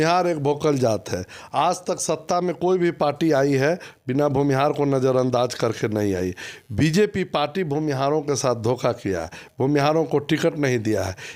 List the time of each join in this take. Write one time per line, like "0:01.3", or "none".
none